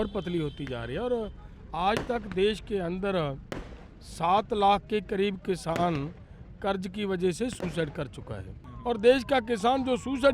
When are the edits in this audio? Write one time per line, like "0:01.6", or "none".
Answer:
0:08.7

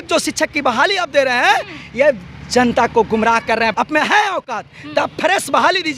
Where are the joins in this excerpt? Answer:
0:03.7

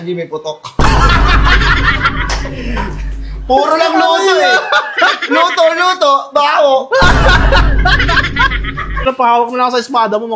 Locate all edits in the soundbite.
0:09.1

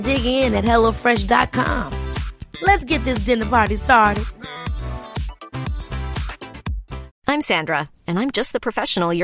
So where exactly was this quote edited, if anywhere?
0:07.1

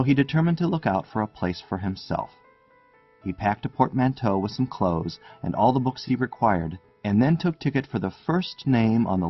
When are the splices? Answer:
0:06.0

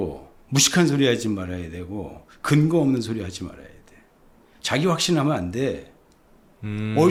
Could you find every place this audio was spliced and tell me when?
none

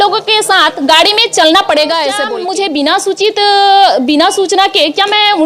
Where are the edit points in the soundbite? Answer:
0:02.3

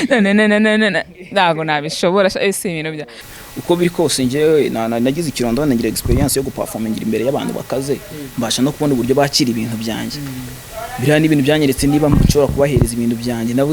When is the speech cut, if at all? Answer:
0:03.2

